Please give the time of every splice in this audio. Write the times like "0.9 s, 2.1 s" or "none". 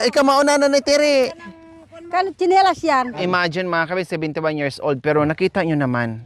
3.2 s